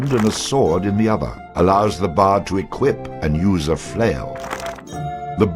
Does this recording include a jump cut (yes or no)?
yes